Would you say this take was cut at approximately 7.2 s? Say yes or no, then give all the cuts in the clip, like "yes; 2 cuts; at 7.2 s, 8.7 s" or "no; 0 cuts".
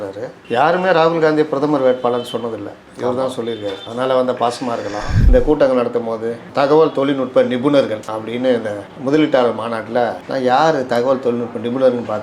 no; 1 cut; at 5.2 s